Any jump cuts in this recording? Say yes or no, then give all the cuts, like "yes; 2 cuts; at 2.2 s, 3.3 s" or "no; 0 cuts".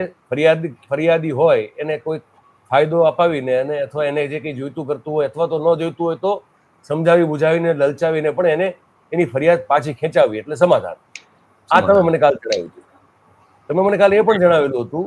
no; 0 cuts